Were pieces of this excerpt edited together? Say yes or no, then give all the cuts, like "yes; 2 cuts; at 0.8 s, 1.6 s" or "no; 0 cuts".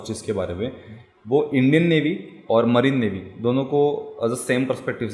no; 0 cuts